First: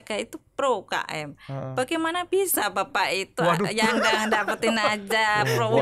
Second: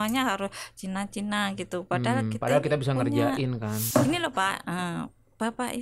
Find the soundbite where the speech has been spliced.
second; 1 cut; at 3.8 s

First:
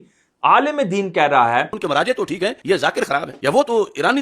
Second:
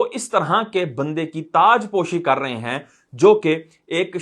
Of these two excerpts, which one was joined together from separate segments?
first; 1 cut; at 1.8 s

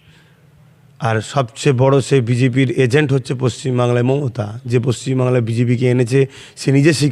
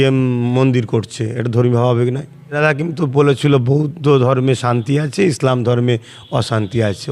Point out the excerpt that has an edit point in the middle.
second; 1 cut; at 2.6 s

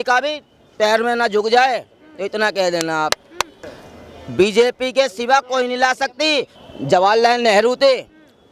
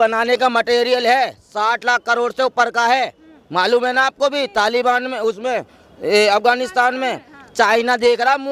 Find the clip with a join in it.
first; 2 cuts; at 3.5 s, 6.5 s

